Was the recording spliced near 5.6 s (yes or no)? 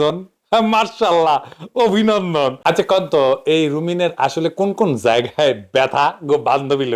no